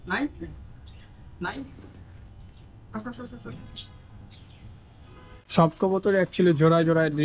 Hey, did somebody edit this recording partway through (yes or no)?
yes